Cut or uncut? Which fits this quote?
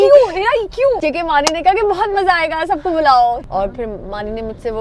cut